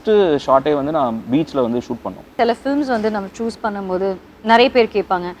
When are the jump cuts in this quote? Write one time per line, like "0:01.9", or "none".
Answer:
0:02.3